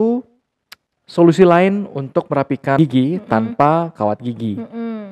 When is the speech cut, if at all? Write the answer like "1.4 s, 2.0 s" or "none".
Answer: 2.8 s